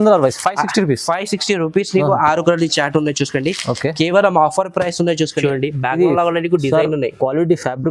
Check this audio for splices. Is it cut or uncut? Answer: cut